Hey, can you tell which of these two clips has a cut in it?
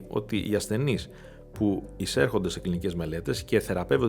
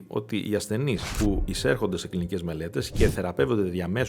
second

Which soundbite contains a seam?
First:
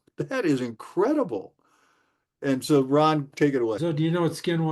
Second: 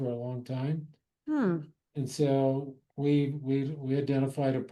first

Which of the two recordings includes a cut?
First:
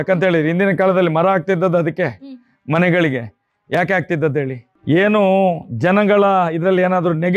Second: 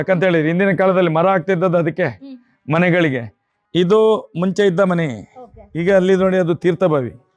second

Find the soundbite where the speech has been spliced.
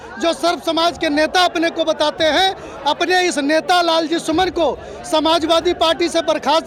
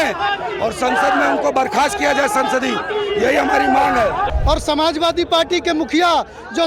second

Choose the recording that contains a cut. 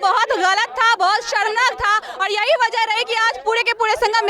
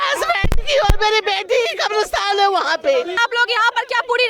second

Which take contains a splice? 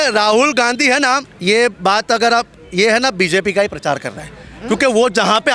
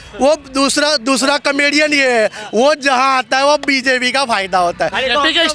first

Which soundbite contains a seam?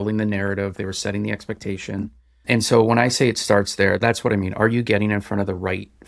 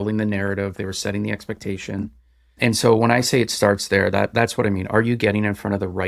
first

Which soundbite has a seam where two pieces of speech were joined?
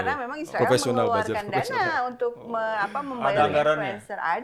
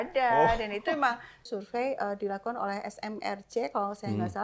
second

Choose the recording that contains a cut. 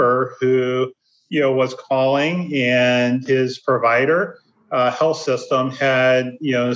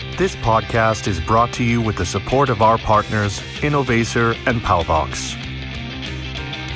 second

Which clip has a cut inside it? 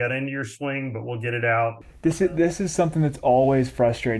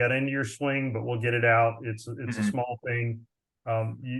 first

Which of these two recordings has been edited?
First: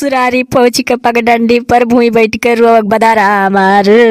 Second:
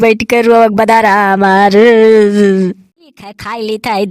second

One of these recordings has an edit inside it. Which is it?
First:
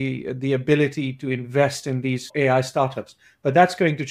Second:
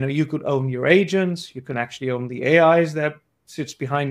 first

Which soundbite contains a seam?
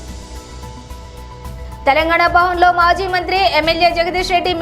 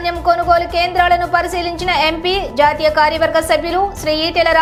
first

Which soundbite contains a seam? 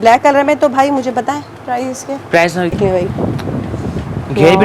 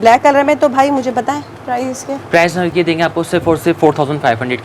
first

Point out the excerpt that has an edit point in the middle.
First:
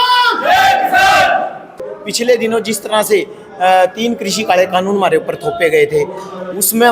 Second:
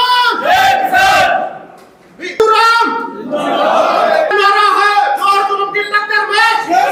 first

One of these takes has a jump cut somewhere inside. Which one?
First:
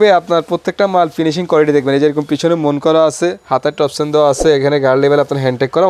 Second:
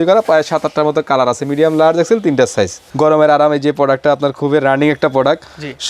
second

